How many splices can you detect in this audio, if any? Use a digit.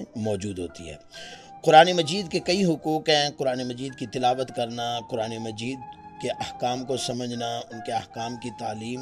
0